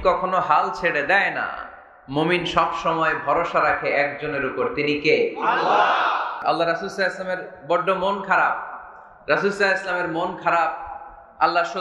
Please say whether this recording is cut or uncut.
cut